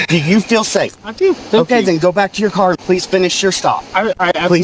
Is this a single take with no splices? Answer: yes; 0 cuts

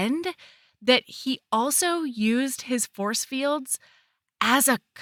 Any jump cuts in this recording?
no; 0 cuts

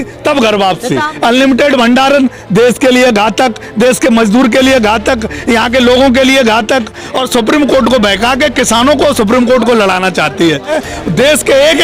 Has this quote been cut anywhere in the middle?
yes; 3 cuts; at 1.1 s, 7.0 s, 10.8 s

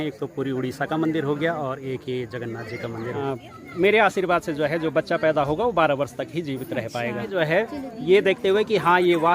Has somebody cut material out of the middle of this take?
yes; 2 cuts; at 3.2 s, 7.3 s

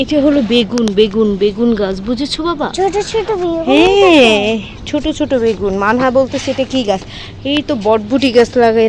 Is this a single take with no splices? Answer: yes; 0 cuts

